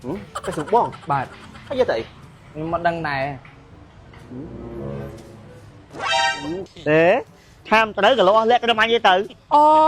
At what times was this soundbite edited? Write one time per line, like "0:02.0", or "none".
0:06.6